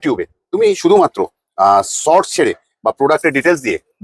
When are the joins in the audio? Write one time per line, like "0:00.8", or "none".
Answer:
none